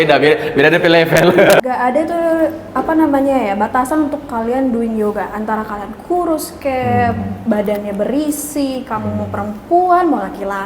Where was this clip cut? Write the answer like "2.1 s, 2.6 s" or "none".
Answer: 1.6 s